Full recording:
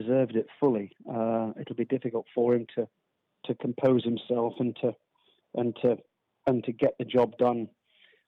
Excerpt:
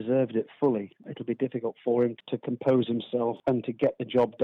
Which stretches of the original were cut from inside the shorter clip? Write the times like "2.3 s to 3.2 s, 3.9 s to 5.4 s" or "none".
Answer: 1.0 s to 1.5 s, 2.7 s to 3.3 s, 4.5 s to 6.4 s